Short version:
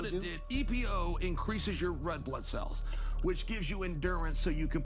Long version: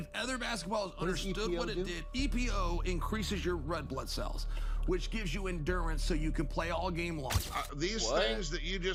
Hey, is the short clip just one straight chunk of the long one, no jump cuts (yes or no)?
yes